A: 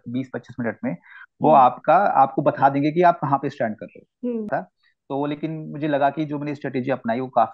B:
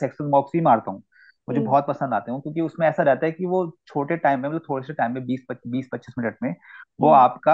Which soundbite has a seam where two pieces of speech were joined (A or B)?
A